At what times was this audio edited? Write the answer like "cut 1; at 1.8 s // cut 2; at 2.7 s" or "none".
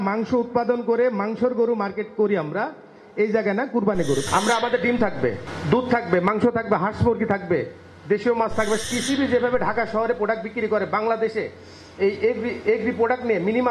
cut 1; at 4.3 s // cut 2; at 5.5 s // cut 3; at 8.8 s

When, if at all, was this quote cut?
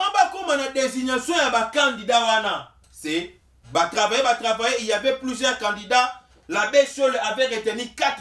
none

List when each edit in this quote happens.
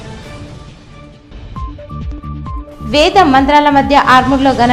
cut 1; at 1.2 s

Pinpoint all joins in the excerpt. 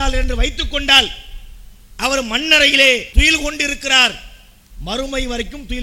cut 1; at 3.1 s

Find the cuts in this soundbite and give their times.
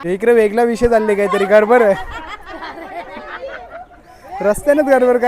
none

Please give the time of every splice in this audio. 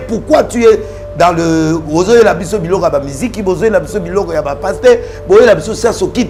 none

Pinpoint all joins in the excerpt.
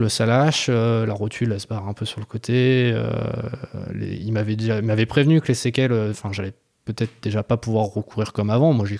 none

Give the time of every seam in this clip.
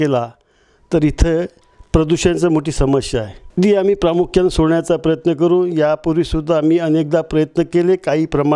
cut 1; at 3.4 s

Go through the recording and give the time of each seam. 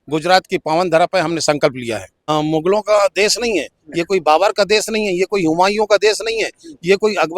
cut 1; at 2.3 s

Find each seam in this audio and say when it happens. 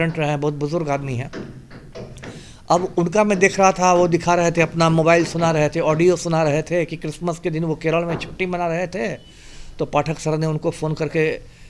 none

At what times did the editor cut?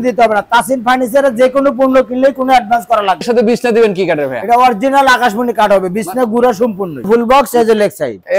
cut 1; at 3.3 s // cut 2; at 7.0 s

